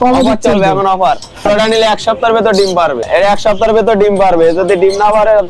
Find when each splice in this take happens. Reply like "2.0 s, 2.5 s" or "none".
1.4 s, 3.0 s